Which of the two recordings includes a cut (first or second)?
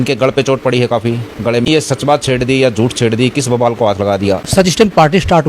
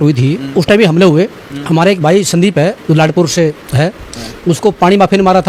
first